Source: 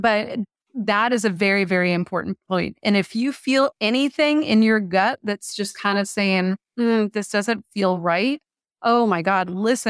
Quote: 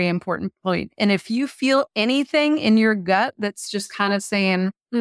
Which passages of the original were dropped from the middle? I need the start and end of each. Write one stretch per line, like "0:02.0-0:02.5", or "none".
none